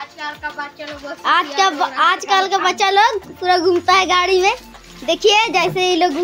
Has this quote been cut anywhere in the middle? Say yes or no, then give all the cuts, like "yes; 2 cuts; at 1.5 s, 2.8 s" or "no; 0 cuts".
no; 0 cuts